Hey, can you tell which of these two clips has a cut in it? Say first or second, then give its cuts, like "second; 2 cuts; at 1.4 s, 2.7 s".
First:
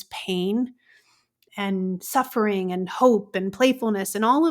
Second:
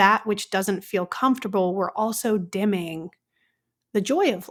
first; 1 cut; at 1.4 s